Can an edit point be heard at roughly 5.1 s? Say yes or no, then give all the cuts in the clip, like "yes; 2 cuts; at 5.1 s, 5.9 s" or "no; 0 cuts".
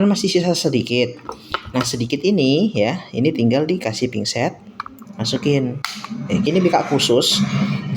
no; 1 cut; at 6.4 s